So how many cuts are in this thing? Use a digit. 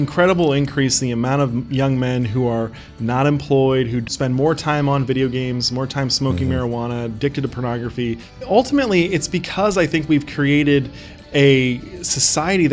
2